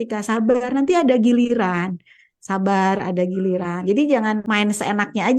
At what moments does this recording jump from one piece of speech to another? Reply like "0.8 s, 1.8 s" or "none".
4.4 s